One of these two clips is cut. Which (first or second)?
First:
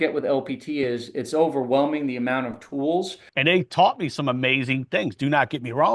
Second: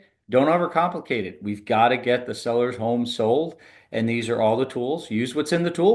first